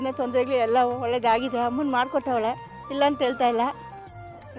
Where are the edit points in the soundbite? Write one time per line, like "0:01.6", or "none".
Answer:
none